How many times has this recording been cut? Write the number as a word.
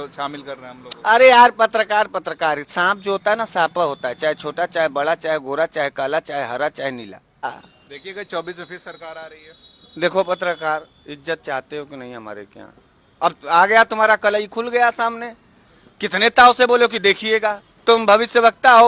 one